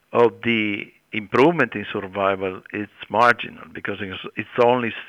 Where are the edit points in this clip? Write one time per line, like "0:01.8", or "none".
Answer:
0:01.1
0:02.9